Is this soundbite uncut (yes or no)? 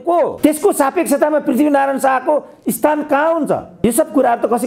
yes